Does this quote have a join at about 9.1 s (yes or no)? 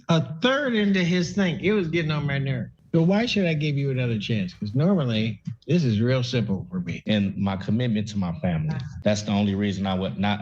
no